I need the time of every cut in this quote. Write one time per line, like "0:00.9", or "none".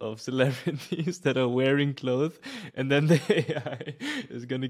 none